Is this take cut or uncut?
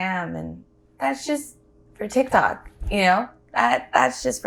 uncut